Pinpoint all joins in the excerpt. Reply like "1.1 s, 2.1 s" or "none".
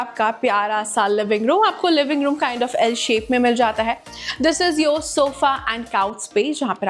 none